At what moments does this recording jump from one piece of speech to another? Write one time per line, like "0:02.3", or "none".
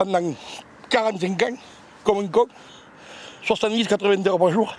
none

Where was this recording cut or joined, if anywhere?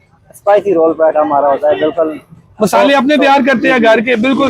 none

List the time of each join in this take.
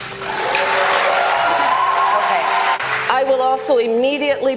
0:02.8

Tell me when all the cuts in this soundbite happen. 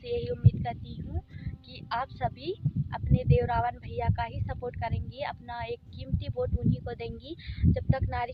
none

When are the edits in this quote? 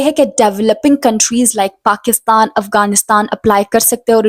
none

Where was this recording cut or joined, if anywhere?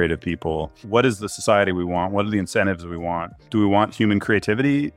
0:00.8
0:03.5

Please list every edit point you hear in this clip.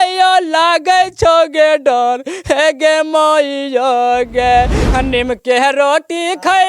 0:04.8

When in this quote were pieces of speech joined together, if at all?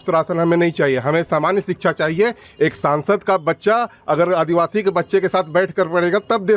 none

